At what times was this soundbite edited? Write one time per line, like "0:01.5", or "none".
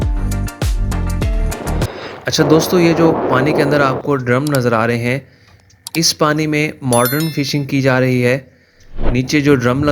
none